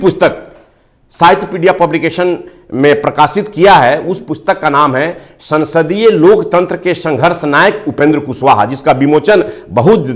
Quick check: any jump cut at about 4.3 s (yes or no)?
no